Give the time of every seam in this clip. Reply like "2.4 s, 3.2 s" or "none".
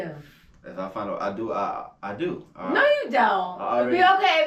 none